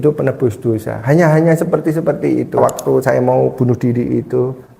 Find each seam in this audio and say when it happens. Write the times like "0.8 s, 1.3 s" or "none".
2.6 s